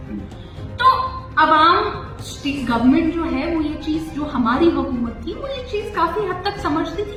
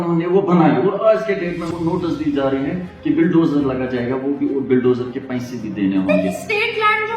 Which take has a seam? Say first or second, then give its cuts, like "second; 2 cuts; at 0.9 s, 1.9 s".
second; 1 cut; at 1.7 s